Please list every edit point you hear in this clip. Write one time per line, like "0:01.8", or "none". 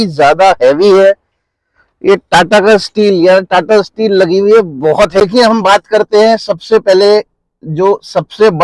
0:05.2